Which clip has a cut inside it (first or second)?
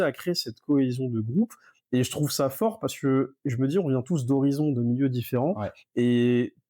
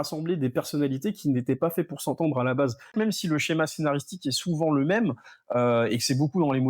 second